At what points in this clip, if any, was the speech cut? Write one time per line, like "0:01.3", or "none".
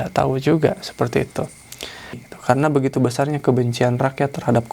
0:02.2